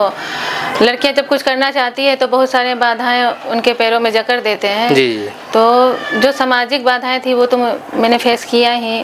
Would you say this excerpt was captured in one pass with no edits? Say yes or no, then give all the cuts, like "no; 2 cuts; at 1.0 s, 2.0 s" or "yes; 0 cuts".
yes; 0 cuts